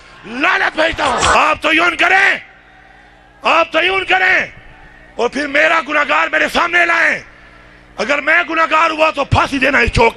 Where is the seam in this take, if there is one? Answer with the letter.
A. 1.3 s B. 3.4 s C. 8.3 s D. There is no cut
A